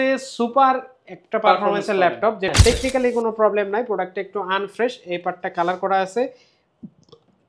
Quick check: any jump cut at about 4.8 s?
no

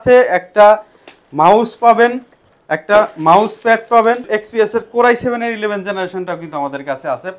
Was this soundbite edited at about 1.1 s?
no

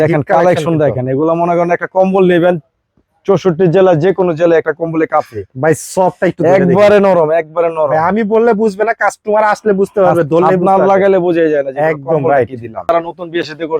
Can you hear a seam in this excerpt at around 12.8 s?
yes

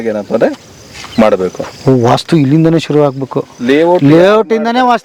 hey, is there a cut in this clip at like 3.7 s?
no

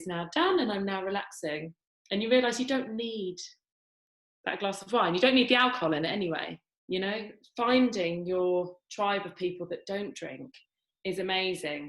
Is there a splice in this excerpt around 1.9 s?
no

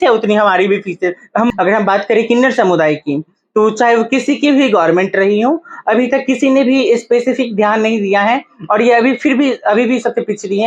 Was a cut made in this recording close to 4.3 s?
no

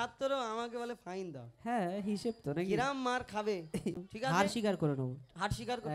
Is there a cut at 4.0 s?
yes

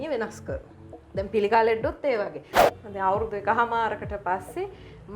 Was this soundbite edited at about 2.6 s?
yes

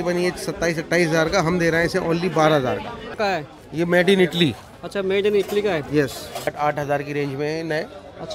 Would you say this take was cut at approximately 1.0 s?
no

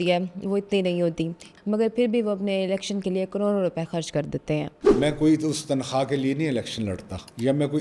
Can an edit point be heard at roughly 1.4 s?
yes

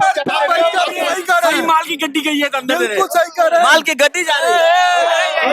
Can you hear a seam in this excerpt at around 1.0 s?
yes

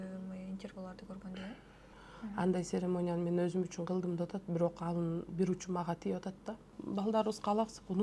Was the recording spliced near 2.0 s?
yes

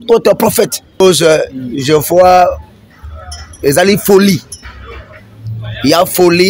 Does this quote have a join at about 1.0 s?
yes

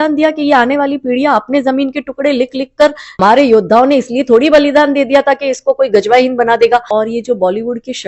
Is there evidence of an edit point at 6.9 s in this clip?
yes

